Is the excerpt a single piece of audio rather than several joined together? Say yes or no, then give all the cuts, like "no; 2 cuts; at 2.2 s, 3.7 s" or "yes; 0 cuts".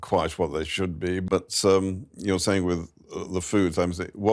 no; 1 cut; at 1.2 s